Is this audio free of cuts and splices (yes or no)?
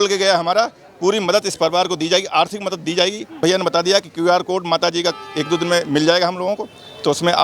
no